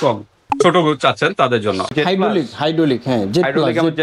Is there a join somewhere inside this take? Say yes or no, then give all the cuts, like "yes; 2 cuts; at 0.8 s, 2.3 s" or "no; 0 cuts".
yes; 1 cut; at 1.9 s